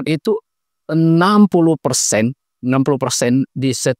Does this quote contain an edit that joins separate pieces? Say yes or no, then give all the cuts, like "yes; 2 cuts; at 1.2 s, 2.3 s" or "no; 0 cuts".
no; 0 cuts